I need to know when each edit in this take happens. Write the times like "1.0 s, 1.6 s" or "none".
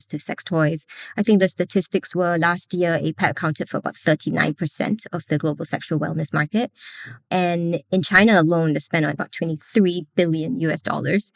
9.1 s